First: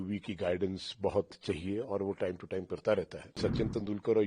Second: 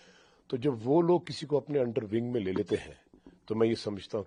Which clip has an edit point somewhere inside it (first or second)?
first